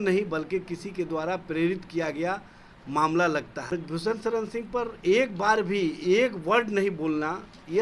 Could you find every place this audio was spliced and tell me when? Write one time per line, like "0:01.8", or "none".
0:03.7